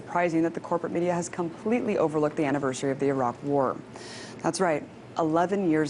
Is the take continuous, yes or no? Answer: no